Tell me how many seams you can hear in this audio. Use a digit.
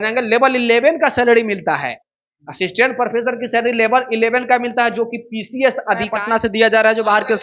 1